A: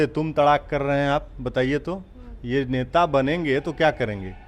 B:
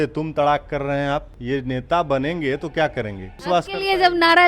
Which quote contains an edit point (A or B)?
B